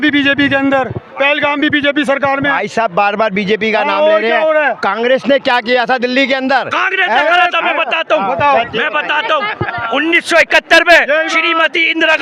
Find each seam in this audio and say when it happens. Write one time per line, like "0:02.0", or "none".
none

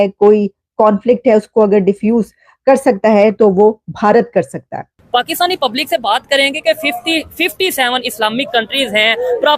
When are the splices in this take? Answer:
0:04.9

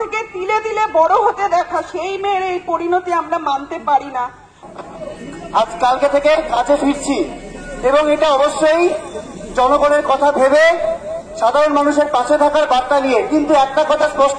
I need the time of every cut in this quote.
0:04.6

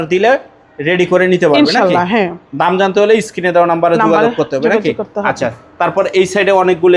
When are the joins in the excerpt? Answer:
none

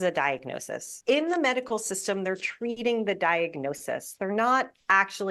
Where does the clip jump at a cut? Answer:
0:00.9

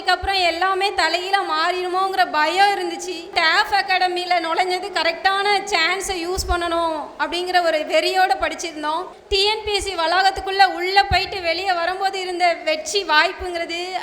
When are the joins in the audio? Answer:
0:03.3
0:09.1

